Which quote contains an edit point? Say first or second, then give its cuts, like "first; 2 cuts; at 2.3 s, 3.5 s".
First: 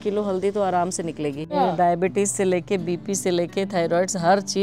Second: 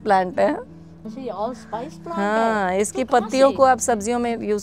first; 1 cut; at 1.5 s